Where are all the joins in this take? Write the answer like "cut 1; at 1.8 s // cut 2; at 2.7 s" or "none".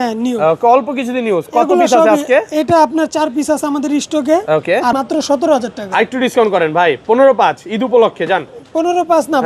cut 1; at 4.9 s